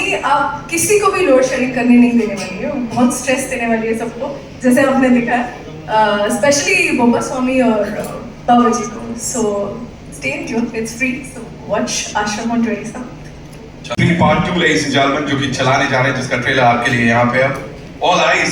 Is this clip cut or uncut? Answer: cut